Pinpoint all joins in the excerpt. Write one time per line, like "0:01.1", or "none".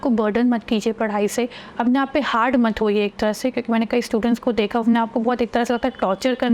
none